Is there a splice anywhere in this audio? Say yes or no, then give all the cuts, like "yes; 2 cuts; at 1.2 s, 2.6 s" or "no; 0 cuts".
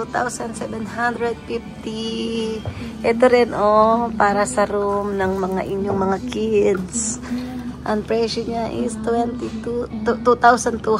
no; 0 cuts